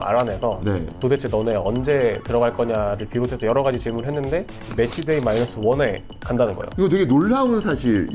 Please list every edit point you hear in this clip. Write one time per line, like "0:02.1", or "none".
0:00.9
0:04.7